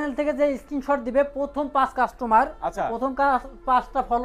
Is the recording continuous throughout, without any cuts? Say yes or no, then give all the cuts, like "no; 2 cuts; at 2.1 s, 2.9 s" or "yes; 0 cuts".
yes; 0 cuts